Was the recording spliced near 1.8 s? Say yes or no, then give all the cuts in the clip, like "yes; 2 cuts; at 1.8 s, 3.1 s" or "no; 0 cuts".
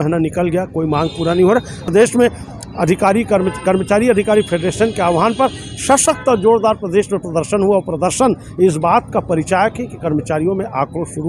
yes; 1 cut; at 1.8 s